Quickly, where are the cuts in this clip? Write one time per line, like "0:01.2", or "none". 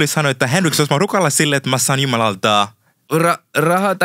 0:03.0